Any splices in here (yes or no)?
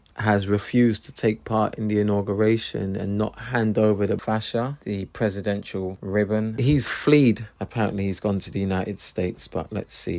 no